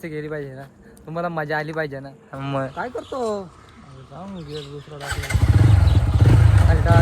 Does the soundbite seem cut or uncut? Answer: cut